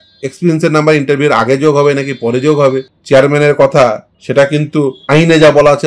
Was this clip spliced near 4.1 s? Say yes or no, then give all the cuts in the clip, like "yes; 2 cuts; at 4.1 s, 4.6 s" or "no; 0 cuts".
yes; 3 cuts; at 2.9 s, 4.1 s, 5.0 s